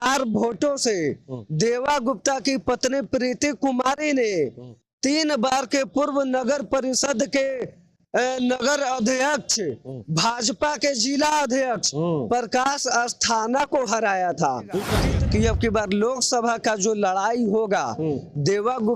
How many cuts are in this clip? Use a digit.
1